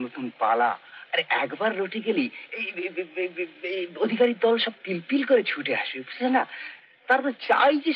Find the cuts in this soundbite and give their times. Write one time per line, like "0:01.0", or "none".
none